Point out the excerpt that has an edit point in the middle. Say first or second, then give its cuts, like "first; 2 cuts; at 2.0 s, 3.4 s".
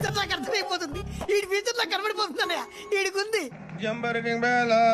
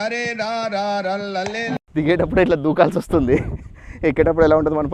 first; 1 cut; at 3.6 s